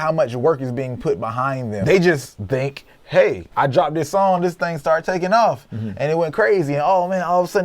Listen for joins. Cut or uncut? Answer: cut